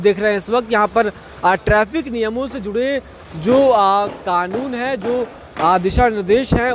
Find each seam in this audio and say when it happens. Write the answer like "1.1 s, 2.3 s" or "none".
none